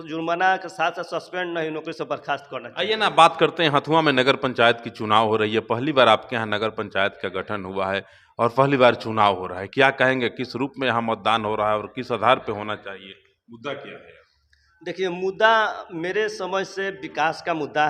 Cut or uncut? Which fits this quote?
uncut